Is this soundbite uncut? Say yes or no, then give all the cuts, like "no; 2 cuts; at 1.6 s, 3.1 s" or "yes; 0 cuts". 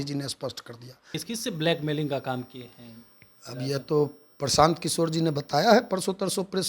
no; 1 cut; at 1.2 s